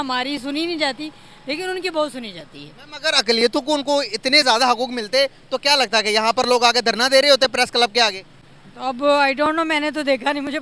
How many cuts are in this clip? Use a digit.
0